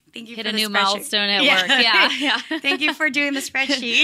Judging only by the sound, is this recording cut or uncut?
uncut